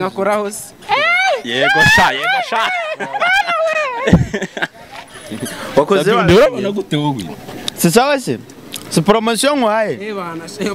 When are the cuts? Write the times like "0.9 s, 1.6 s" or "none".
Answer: none